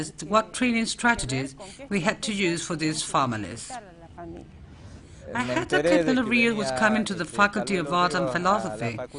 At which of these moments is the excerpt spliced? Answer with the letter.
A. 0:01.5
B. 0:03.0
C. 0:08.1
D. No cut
C